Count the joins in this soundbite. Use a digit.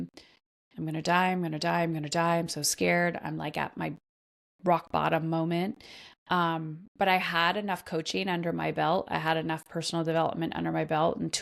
0